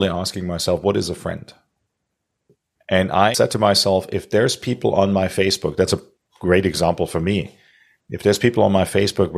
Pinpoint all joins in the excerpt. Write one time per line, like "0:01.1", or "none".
0:02.5
0:03.3